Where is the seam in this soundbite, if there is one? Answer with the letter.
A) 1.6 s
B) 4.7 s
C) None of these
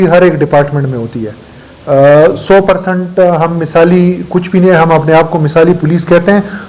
C